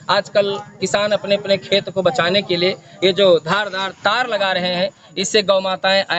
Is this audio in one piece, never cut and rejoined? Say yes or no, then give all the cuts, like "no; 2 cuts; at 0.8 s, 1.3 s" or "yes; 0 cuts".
no; 1 cut; at 3.6 s